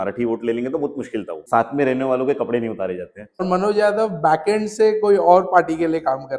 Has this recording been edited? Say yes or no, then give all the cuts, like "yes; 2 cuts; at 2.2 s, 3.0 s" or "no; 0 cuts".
yes; 2 cuts; at 1.4 s, 3.4 s